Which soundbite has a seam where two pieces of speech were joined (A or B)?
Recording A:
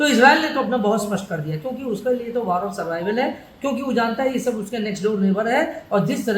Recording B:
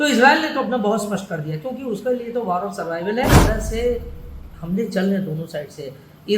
B